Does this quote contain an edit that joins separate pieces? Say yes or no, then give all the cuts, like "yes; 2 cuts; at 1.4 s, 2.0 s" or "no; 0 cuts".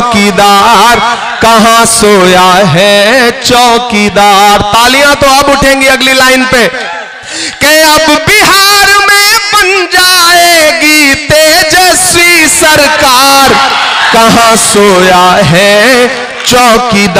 no; 0 cuts